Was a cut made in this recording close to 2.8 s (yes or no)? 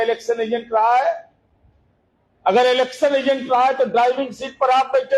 no